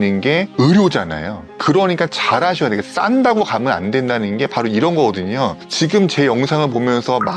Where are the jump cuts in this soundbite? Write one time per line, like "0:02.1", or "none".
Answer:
none